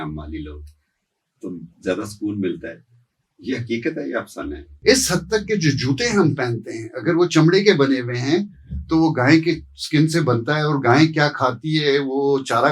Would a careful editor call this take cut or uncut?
cut